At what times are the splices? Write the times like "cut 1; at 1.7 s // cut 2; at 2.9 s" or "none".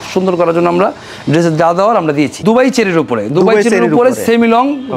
cut 1; at 2.4 s